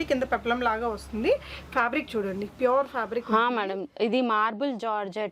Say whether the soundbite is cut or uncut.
uncut